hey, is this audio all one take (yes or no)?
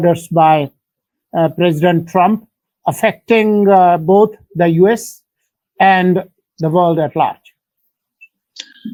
yes